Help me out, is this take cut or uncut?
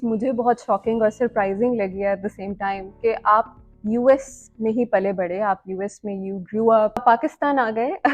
cut